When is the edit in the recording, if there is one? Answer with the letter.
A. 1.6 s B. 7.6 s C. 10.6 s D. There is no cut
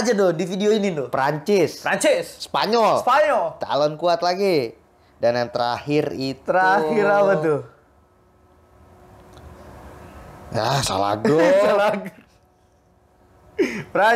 D